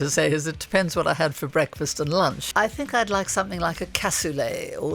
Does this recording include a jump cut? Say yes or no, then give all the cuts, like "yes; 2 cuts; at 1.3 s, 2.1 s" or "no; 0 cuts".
yes; 1 cut; at 2.4 s